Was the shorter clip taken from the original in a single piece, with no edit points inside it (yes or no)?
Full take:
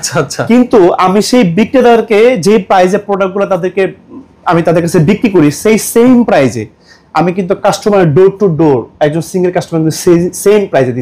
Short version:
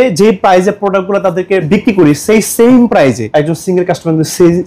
no